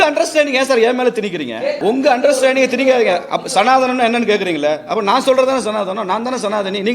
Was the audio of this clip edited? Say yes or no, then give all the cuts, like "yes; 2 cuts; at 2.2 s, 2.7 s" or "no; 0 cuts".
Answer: yes; 1 cut; at 1.8 s